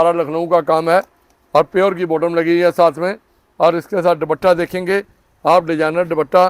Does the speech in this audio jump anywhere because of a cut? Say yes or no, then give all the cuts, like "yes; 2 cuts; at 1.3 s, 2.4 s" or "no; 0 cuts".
no; 0 cuts